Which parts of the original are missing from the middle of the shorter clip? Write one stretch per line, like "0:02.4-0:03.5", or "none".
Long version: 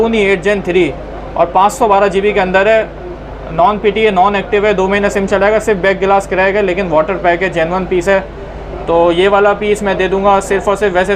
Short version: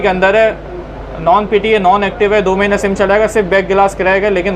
none

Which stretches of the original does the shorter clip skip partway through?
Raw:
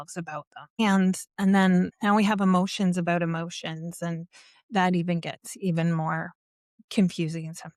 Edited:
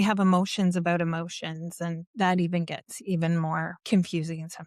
0:04.3-0:04.6
0:06.3-0:06.8

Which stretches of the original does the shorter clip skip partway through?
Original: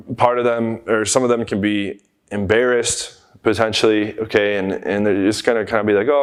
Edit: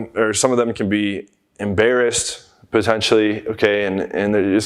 none

